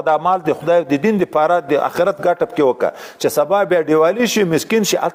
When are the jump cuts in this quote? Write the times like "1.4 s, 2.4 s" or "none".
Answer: none